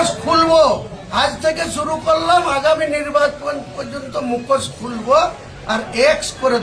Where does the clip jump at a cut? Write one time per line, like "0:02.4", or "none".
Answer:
0:01.0